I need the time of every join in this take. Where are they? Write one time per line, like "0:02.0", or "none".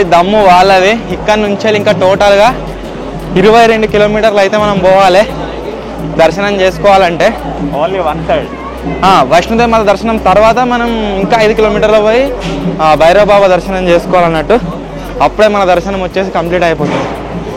none